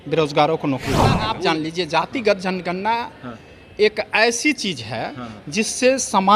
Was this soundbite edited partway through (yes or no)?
yes